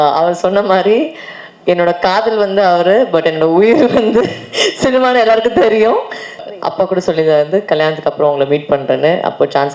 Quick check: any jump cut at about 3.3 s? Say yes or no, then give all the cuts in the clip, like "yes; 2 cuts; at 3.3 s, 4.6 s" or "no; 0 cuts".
no; 1 cut; at 6.4 s